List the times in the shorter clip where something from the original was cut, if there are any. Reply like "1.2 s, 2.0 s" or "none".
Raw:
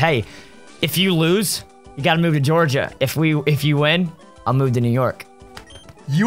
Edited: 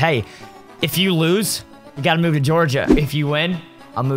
2.9 s